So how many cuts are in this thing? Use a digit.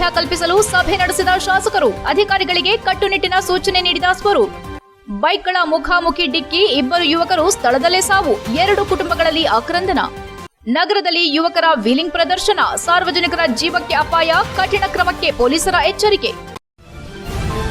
1